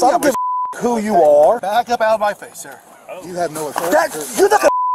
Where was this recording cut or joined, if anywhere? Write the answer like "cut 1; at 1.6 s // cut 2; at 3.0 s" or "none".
cut 1; at 1.6 s

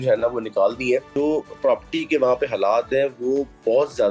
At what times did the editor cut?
cut 1; at 1.1 s

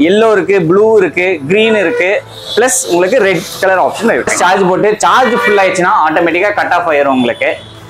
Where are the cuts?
cut 1; at 4.3 s

